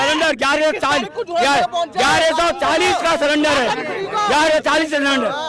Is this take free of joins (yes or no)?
yes